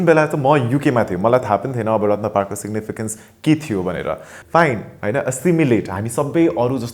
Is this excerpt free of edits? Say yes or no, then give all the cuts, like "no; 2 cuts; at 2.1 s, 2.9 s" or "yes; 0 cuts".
no; 1 cut; at 4.3 s